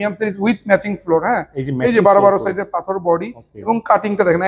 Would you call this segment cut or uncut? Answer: uncut